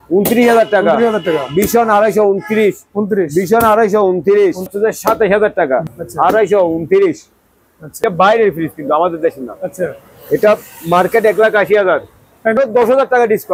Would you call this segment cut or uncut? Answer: cut